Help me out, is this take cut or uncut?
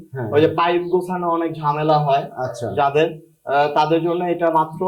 uncut